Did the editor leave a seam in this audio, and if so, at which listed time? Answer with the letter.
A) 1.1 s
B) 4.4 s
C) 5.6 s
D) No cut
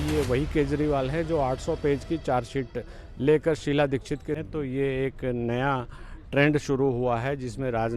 B